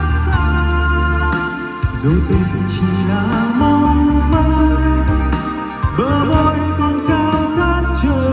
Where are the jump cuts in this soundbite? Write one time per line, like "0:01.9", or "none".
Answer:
none